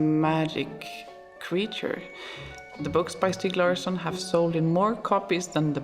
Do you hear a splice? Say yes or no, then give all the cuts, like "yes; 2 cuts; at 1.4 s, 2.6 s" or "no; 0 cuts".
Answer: yes; 1 cut; at 2.7 s